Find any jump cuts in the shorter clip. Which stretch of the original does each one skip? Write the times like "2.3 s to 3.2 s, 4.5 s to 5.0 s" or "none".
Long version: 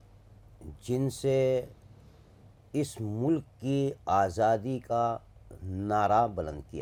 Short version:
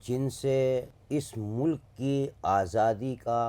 1.8 s to 2.6 s